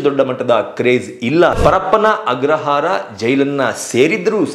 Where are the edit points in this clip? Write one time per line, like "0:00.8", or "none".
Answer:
0:01.6